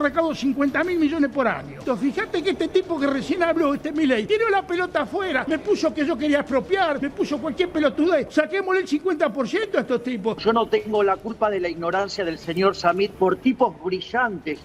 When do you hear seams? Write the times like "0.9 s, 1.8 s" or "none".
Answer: 1.7 s, 4.2 s, 5.4 s, 7.0 s, 8.3 s, 10.4 s, 13.1 s